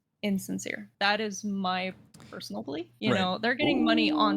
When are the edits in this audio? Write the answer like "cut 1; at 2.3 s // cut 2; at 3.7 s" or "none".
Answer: cut 1; at 2.4 s

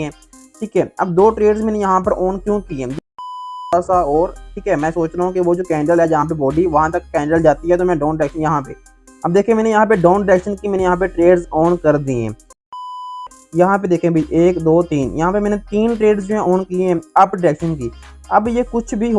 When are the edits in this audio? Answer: cut 1; at 3.5 s // cut 2; at 12.8 s

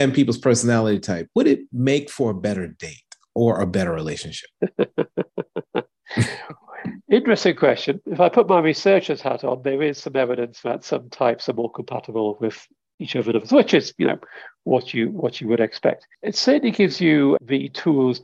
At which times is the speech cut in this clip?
cut 1; at 16.1 s // cut 2; at 17.4 s

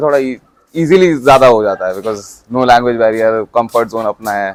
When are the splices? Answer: none

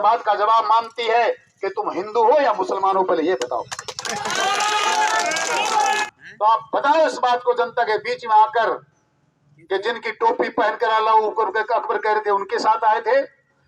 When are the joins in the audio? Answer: cut 1; at 6.0 s

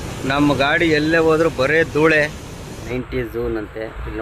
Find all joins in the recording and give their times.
cut 1; at 2.9 s

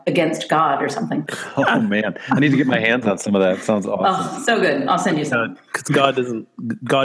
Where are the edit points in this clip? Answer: cut 1; at 1.4 s

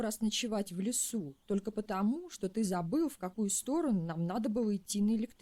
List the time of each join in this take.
none

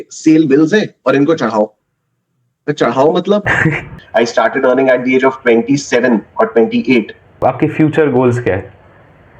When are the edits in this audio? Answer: cut 1; at 4.0 s // cut 2; at 7.4 s

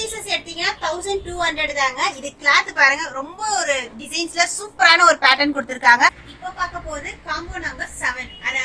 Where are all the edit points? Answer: cut 1; at 6.2 s

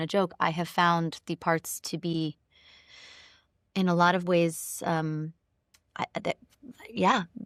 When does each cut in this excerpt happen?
none

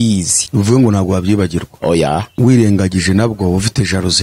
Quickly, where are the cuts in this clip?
cut 1; at 2.3 s

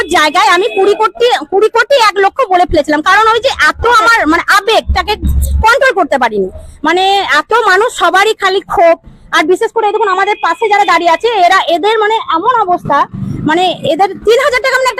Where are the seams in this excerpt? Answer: none

